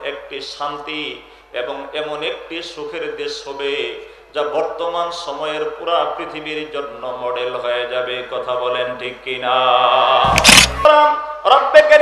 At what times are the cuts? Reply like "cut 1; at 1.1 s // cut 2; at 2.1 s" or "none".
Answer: cut 1; at 10.9 s